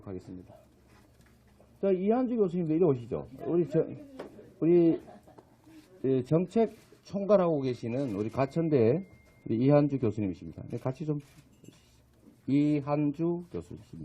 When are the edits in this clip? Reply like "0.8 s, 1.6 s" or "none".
none